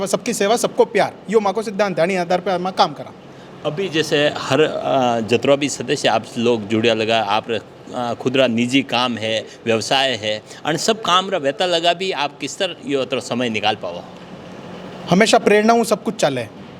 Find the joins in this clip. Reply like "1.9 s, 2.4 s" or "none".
none